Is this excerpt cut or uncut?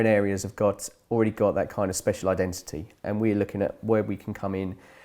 cut